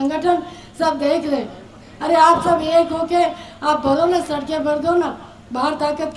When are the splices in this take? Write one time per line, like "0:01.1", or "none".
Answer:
none